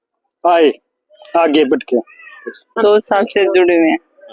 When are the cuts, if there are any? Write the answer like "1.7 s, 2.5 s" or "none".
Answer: 2.8 s

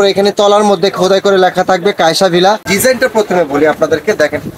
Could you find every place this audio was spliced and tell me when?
2.7 s

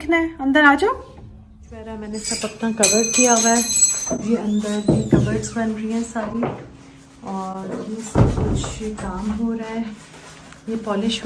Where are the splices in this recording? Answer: none

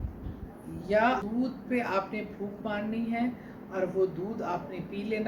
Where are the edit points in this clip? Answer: 1.2 s

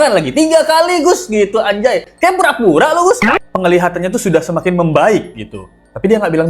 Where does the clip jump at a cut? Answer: 3.4 s

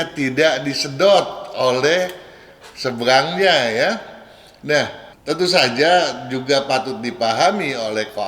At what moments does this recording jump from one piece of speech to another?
none

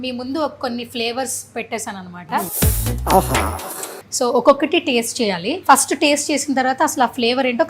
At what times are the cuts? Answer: 2.5 s, 4.0 s, 5.5 s

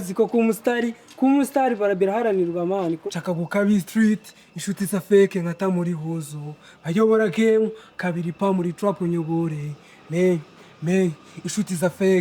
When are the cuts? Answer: 3.0 s

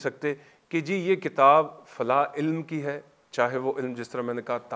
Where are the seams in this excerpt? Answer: none

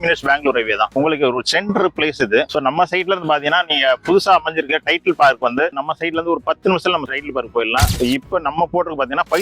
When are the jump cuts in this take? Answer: 7.9 s

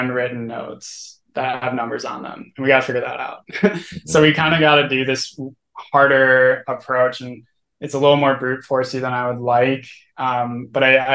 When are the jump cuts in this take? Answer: none

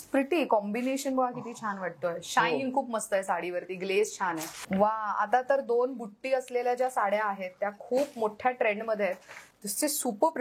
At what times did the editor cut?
4.5 s, 9.5 s

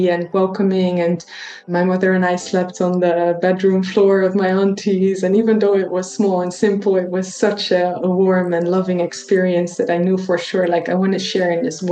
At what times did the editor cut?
1.7 s

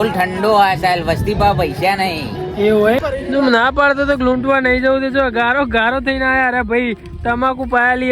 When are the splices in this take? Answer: 3.0 s

